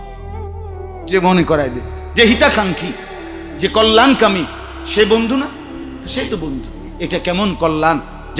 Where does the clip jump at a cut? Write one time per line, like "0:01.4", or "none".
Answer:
0:01.1